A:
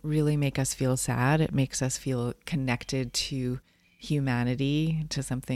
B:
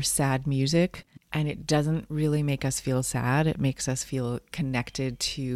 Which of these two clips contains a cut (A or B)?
B